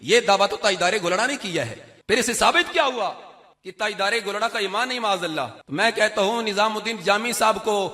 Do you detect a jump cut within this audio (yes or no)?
yes